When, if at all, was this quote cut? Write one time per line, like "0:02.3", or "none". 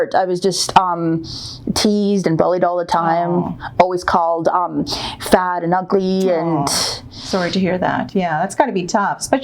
none